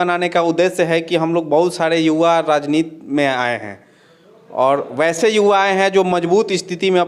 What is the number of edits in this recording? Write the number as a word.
zero